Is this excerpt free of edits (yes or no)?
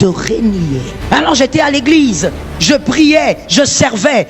no